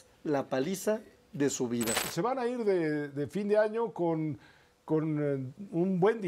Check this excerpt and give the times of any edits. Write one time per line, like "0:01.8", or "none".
0:02.0